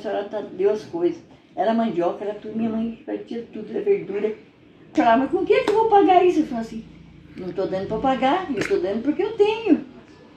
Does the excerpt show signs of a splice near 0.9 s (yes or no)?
no